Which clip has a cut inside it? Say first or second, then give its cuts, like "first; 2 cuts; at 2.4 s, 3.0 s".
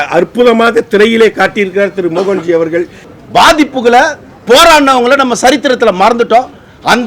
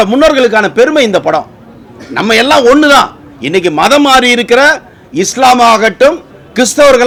first; 1 cut; at 3.0 s